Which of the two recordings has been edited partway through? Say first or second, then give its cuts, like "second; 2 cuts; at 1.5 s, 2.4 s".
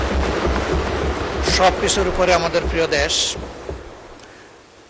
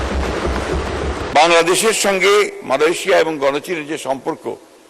second; 1 cut; at 1.3 s